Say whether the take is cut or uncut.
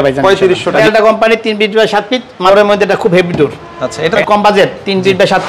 cut